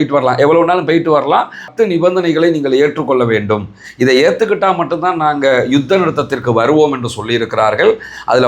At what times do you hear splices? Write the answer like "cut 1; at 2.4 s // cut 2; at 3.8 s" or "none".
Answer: cut 1; at 1.7 s